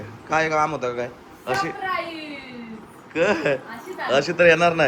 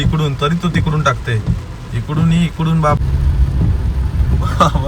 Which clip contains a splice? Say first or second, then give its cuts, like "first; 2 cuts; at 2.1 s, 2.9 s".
second; 1 cut; at 3.0 s